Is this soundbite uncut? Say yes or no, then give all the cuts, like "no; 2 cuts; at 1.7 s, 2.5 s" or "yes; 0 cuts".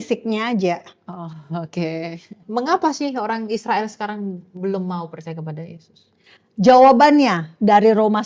no; 1 cut; at 2.4 s